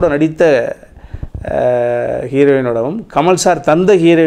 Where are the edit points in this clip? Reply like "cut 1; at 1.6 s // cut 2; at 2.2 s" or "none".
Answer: none